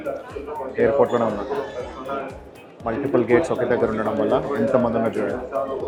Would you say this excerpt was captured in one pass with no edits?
yes; 0 cuts

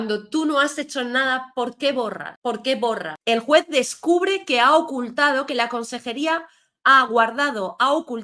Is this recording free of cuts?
no; 1 cut; at 3.1 s

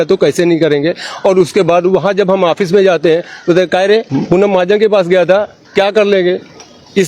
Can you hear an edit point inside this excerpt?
yes; 1 cut; at 4.1 s

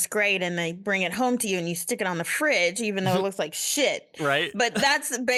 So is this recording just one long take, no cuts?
yes; 0 cuts

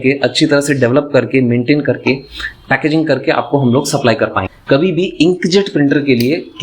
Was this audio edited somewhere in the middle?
yes; 1 cut; at 4.5 s

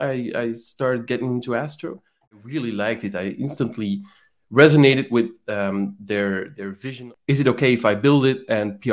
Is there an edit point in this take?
yes; 2 cuts; at 2.4 s, 6.9 s

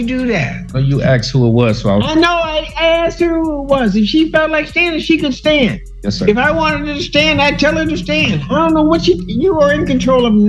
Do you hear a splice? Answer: no; 0 cuts

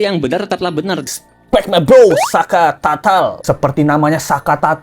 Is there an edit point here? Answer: yes; 1 cut; at 1.1 s

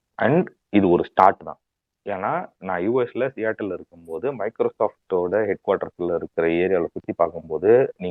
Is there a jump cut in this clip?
no; 0 cuts

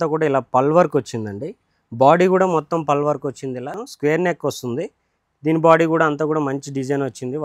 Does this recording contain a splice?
yes; 1 cut; at 3.9 s

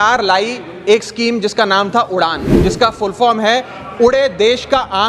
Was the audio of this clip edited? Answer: yes; 1 cut; at 2.5 s

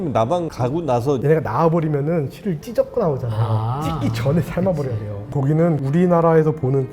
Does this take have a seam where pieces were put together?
yes; 2 cuts; at 1.2 s, 5.3 s

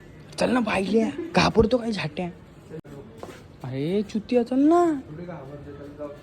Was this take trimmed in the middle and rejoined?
yes; 1 cut; at 2.8 s

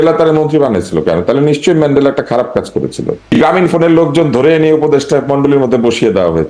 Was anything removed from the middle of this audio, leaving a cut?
yes; 1 cut; at 3.3 s

